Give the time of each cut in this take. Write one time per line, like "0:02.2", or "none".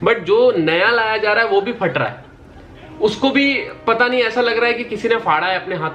none

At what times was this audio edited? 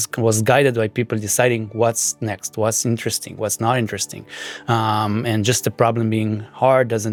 none

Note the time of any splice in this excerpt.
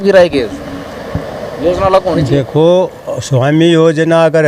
none

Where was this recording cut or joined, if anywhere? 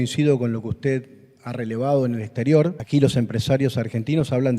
0:02.8

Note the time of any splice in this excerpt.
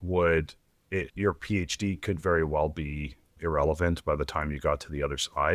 0:01.1

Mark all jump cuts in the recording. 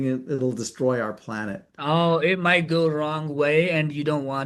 none

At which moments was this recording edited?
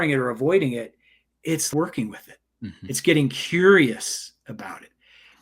0:01.7

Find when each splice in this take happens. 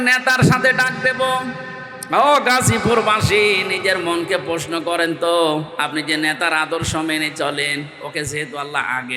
none

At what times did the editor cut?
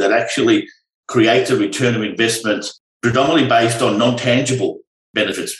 none

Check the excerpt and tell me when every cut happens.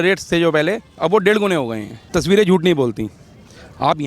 0:01.9

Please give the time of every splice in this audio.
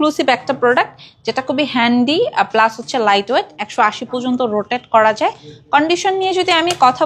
none

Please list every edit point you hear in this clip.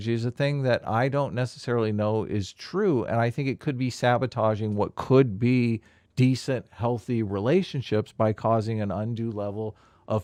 none

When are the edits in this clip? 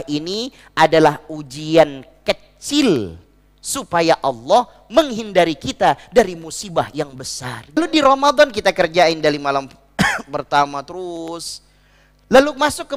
0:07.8

